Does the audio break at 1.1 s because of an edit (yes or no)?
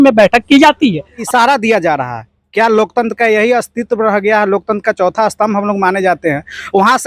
yes